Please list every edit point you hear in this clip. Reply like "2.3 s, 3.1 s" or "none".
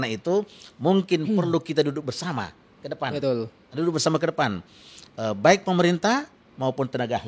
none